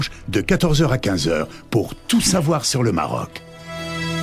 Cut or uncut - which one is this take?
cut